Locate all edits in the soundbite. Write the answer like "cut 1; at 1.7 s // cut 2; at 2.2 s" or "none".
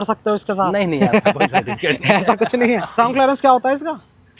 cut 1; at 3.0 s

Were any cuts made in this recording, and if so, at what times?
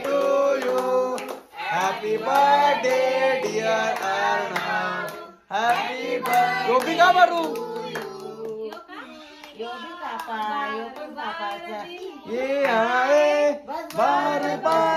none

